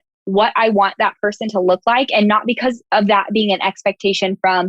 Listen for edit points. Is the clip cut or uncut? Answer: cut